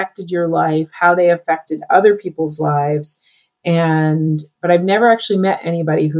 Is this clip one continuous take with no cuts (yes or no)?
yes